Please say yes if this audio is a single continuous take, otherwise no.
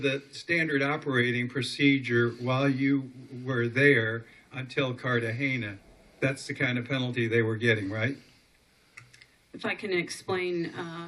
no